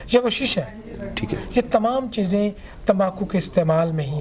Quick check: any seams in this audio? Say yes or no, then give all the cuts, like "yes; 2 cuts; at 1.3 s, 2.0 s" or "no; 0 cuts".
no; 0 cuts